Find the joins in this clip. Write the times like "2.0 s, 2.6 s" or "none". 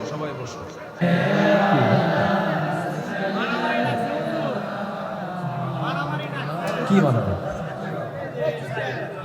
1.0 s